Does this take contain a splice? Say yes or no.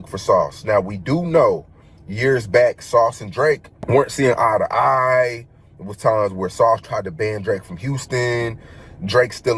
yes